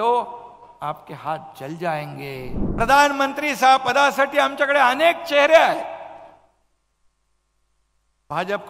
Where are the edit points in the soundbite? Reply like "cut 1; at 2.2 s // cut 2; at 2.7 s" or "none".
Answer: cut 1; at 2.6 s